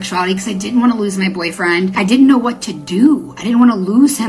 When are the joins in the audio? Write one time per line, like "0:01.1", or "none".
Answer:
0:01.9